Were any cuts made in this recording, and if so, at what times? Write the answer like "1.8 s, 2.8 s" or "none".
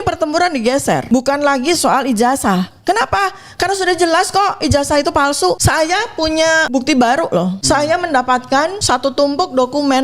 1.0 s, 5.6 s, 6.7 s, 7.6 s, 8.8 s

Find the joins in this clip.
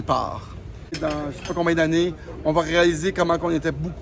1.0 s

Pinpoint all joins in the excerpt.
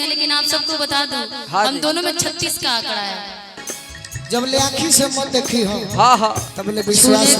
3.7 s

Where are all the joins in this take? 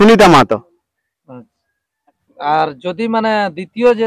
2.2 s

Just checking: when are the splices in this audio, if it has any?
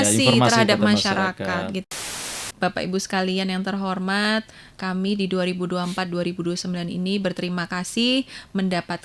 2.0 s

